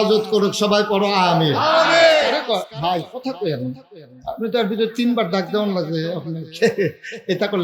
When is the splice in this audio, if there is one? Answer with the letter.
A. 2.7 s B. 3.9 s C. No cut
A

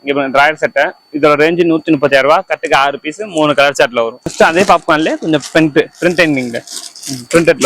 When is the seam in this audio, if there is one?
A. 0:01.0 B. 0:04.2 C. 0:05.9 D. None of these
B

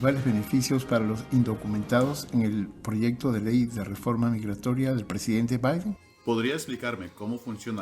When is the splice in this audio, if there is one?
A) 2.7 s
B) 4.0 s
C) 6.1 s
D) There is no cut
C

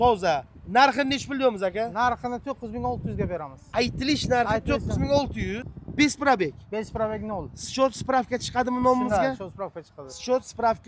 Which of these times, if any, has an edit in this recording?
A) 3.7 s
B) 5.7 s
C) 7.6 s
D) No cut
B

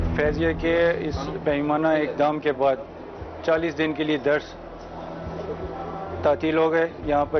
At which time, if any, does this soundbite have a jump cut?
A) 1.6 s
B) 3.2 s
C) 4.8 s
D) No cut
D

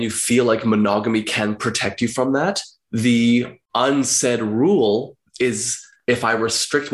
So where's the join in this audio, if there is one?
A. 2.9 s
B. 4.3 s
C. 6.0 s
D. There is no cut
C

